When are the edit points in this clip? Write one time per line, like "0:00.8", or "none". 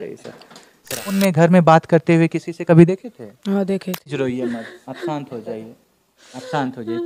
0:01.1
0:04.1